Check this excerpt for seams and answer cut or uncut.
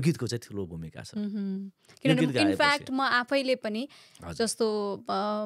uncut